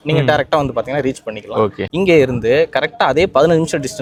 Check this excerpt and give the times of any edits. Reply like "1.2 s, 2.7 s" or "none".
none